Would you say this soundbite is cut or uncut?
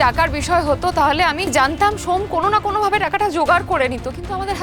cut